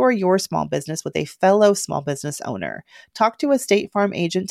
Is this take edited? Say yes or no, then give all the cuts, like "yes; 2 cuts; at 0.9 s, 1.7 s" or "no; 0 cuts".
no; 0 cuts